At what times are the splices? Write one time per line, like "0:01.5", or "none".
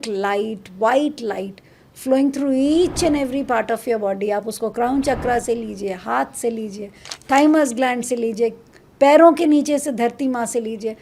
none